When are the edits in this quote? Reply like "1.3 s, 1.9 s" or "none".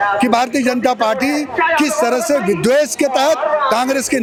none